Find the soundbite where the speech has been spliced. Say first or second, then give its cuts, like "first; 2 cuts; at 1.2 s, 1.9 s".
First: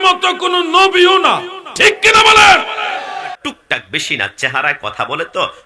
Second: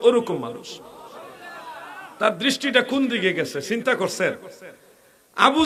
first; 1 cut; at 3.4 s